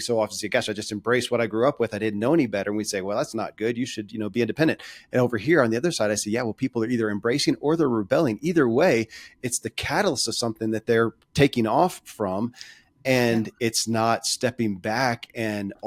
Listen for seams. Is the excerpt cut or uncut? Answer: uncut